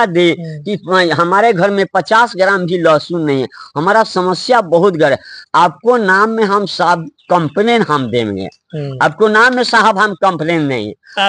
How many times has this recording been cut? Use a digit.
0